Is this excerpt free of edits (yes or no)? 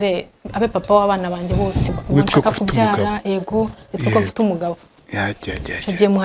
yes